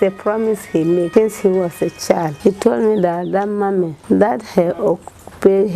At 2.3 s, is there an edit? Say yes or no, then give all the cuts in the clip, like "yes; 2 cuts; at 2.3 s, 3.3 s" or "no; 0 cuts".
yes; 3 cuts; at 1.1 s, 2.3 s, 4.0 s